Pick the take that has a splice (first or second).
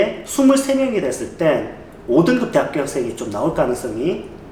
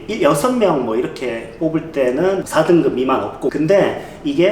second